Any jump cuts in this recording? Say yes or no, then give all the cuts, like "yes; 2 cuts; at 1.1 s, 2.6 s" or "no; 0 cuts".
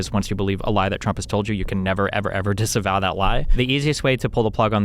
yes; 1 cut; at 3.5 s